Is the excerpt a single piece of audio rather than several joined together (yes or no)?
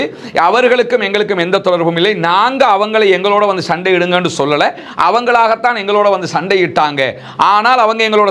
yes